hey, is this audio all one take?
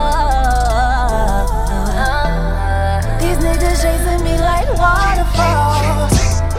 yes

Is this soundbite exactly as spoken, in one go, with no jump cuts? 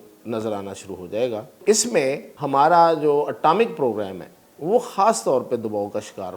no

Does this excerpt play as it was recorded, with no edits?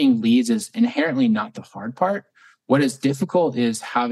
yes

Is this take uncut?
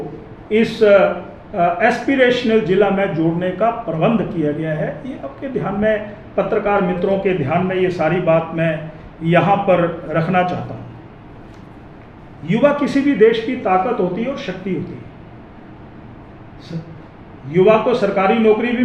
yes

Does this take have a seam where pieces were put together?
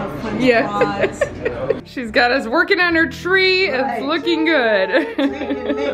yes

